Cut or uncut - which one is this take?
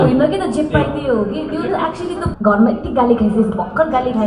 cut